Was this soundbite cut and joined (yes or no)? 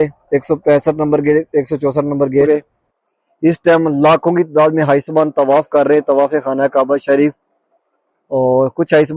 yes